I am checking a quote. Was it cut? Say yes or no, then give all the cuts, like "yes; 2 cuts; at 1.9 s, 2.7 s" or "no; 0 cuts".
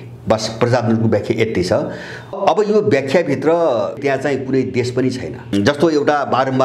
yes; 3 cuts; at 2.4 s, 4.0 s, 5.5 s